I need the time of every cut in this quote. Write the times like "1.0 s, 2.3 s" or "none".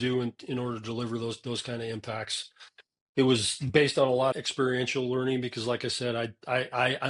4.3 s